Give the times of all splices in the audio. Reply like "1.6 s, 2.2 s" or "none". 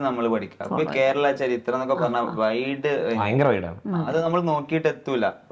none